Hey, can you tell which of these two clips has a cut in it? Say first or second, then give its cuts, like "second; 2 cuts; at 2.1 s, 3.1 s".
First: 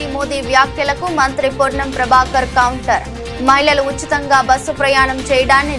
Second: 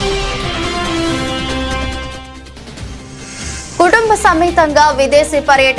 second; 1 cut; at 3.6 s